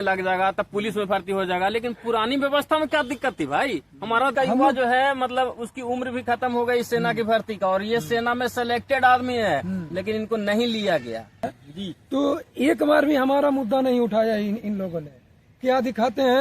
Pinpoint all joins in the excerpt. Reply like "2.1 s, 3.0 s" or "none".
4.3 s, 11.4 s